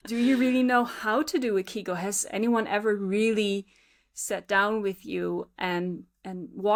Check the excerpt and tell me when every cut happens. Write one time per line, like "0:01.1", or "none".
none